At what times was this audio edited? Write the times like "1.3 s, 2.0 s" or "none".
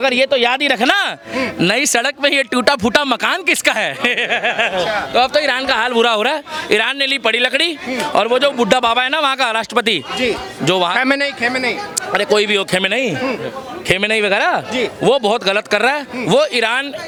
none